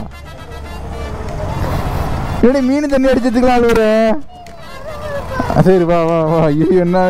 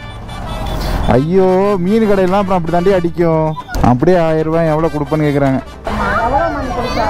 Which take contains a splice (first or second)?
second